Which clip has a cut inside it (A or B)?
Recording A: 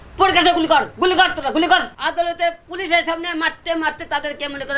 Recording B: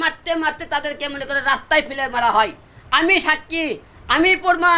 A